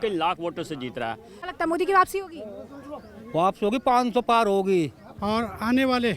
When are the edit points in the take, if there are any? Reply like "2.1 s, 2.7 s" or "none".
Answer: 1.3 s, 5.1 s